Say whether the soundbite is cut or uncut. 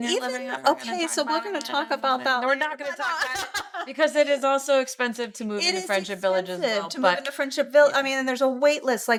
uncut